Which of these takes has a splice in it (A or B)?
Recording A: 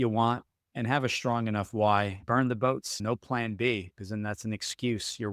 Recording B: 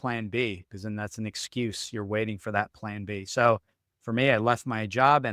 A